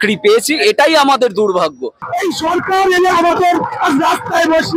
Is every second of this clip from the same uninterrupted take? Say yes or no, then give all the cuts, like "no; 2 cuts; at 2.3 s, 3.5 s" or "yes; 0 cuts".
no; 1 cut; at 2.0 s